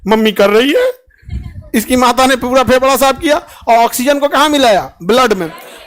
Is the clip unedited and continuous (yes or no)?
yes